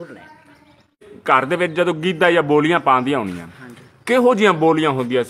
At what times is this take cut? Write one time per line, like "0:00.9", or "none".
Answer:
0:01.1